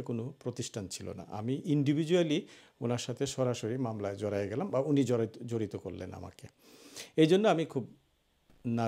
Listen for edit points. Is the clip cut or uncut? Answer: uncut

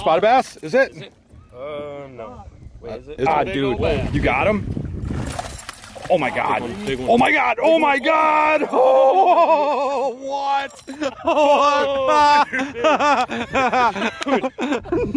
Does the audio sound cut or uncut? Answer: cut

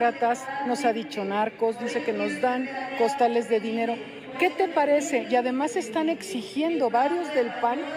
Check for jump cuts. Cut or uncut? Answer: uncut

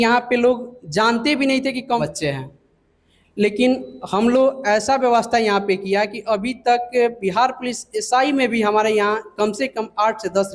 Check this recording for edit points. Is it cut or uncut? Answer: cut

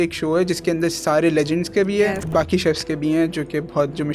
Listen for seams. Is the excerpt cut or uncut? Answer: cut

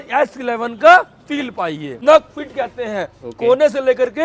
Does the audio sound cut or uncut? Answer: cut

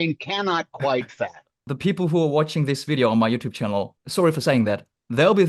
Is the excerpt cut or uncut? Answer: cut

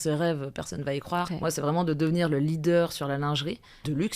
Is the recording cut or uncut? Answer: cut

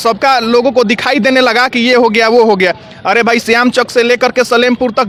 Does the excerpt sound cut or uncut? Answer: uncut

